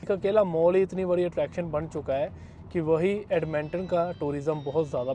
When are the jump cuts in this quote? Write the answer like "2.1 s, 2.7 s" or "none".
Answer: none